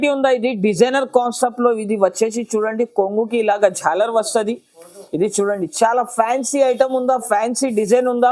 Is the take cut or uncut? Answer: uncut